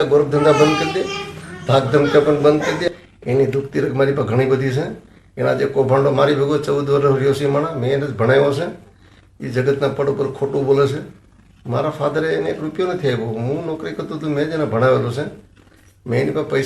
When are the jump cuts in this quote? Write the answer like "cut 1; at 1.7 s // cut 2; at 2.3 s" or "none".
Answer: none

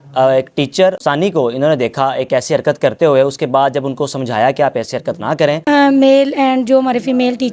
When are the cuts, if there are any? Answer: cut 1; at 1.0 s // cut 2; at 5.6 s

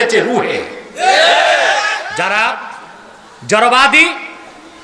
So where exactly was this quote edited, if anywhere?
cut 1; at 2.1 s

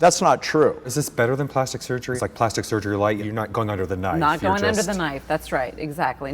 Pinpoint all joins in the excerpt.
cut 1; at 0.9 s // cut 2; at 2.2 s // cut 3; at 3.2 s

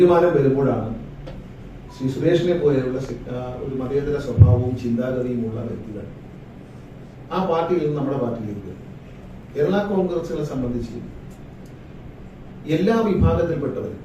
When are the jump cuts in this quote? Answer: none

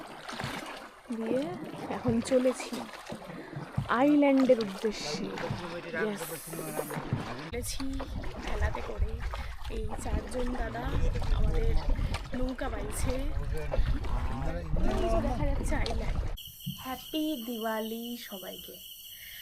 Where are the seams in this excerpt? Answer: cut 1; at 7.5 s // cut 2; at 16.6 s

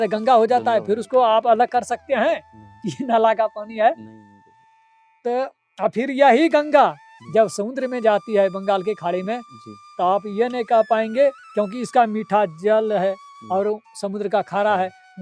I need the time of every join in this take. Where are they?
none

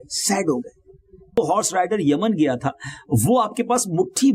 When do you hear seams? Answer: cut 1; at 1.4 s

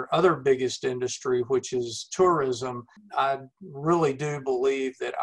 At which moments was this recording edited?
cut 1; at 3.0 s

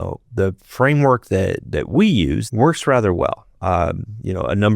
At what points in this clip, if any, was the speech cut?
cut 1; at 2.4 s

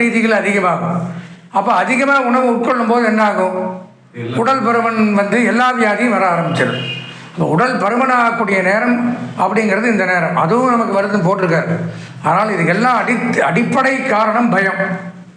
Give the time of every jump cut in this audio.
none

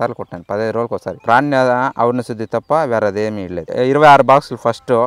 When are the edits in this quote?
cut 1; at 1.1 s // cut 2; at 3.7 s

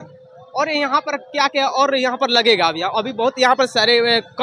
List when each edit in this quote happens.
none

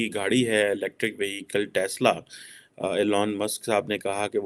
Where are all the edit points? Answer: none

